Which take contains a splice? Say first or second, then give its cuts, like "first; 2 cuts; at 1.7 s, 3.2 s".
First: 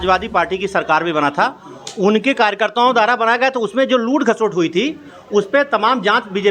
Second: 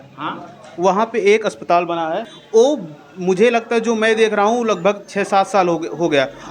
second; 1 cut; at 2.3 s